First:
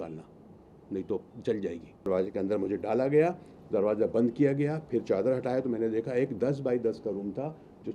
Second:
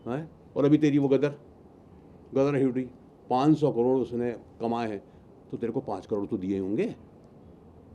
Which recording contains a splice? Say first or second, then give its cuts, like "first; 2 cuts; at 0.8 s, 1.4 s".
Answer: first; 1 cut; at 2.1 s